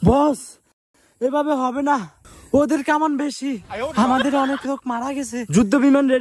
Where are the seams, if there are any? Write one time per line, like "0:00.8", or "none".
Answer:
none